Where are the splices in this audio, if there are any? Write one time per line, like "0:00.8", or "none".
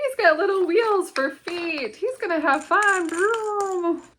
none